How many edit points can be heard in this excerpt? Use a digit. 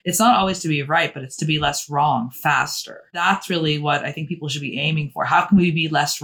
1